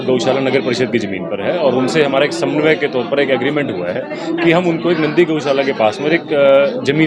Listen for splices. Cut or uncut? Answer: uncut